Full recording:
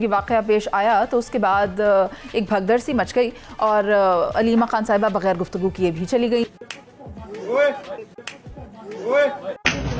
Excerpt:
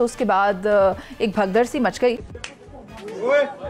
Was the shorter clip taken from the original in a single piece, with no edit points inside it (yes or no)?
no